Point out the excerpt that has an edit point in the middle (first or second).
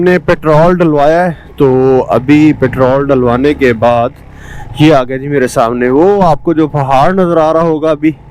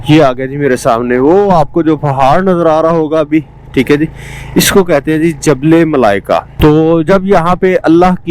second